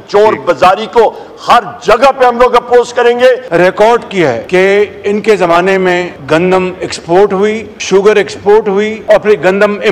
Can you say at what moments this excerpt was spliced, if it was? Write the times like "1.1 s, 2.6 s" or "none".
3.5 s, 4.4 s, 6.1 s, 7.7 s, 9.0 s